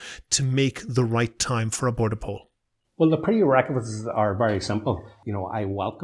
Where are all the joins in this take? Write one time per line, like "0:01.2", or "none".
0:05.1